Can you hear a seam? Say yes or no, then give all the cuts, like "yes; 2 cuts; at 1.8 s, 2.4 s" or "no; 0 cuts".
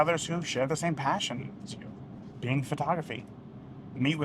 yes; 1 cut; at 2.3 s